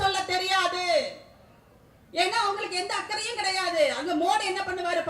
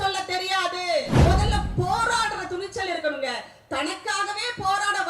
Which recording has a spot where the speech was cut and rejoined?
second; 1 cut; at 1.1 s

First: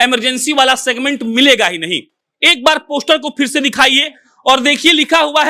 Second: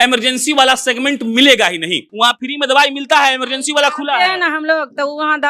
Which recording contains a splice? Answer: second; 1 cut; at 2.0 s

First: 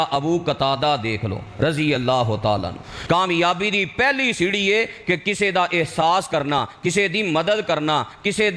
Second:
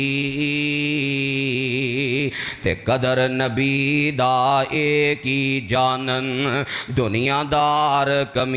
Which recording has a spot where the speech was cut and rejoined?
first; 1 cut; at 2.9 s

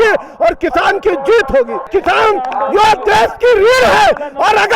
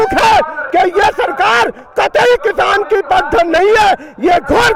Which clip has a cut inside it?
first; 1 cut; at 1.9 s

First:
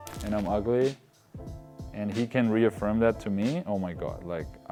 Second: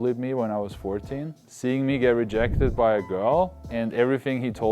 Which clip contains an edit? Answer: second; 2 cuts; at 1.4 s, 3.6 s

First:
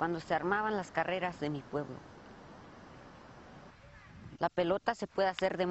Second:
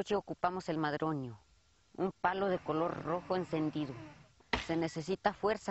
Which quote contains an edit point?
first; 1 cut; at 3.8 s

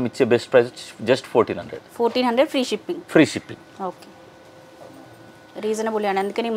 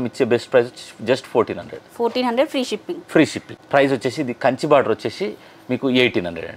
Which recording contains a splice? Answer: second; 1 cut; at 3.5 s

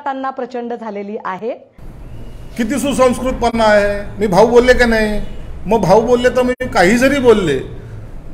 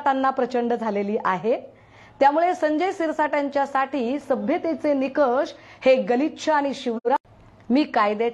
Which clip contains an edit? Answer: first; 1 cut; at 1.4 s

